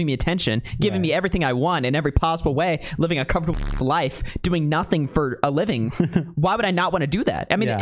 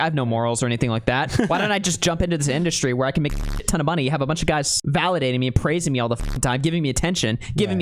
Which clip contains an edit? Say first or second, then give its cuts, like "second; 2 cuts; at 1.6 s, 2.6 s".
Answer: second; 1 cut; at 4.7 s